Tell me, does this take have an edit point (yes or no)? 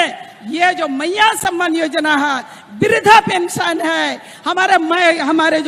no